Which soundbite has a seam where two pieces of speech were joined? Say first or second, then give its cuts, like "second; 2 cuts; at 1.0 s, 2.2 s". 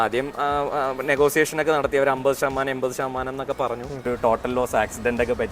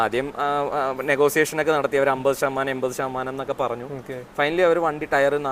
first; 1 cut; at 4.1 s